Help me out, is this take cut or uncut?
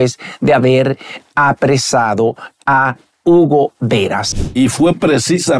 cut